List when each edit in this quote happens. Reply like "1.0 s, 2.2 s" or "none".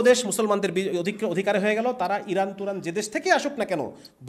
none